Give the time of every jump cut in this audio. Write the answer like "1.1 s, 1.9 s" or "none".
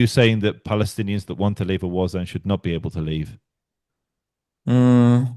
none